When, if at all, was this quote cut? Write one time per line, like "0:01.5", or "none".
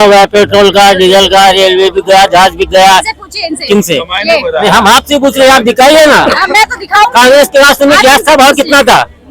none